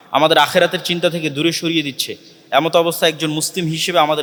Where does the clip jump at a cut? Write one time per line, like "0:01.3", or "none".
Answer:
none